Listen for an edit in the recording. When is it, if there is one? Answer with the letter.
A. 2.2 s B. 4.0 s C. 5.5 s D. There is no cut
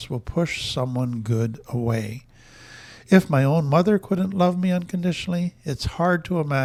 D